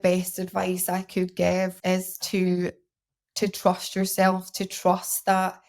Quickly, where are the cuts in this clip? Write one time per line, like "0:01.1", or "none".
0:01.8